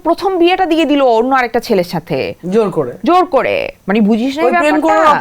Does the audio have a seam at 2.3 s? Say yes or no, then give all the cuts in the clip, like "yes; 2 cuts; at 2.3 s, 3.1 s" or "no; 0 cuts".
no; 0 cuts